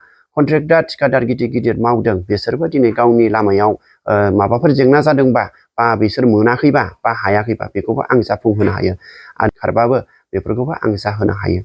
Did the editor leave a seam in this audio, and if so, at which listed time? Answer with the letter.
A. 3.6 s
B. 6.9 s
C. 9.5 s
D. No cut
C